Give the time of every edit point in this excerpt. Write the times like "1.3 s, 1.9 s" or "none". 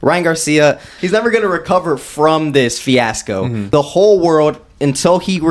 1.0 s, 3.6 s